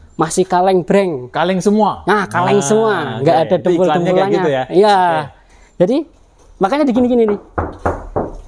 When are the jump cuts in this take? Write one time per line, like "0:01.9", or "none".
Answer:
none